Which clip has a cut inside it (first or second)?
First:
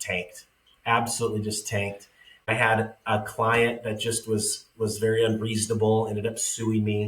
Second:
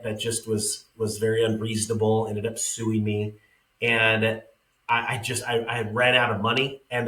first